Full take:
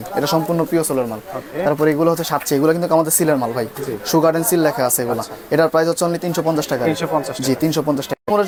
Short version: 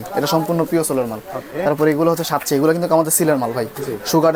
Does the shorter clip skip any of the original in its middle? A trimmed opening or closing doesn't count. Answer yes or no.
no